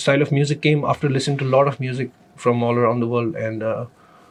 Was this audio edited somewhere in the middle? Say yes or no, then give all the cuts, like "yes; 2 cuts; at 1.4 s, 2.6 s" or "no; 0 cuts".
no; 0 cuts